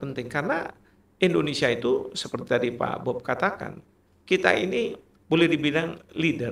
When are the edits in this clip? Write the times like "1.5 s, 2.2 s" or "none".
none